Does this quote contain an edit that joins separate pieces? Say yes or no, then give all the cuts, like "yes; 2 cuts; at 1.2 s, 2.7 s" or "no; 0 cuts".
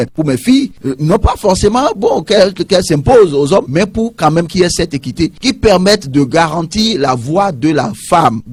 no; 0 cuts